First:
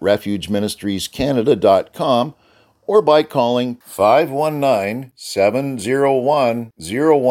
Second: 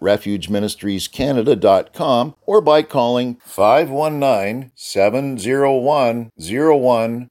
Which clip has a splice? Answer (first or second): second